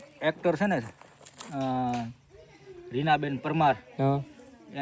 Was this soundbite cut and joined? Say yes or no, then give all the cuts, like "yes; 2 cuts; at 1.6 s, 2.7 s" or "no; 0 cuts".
no; 0 cuts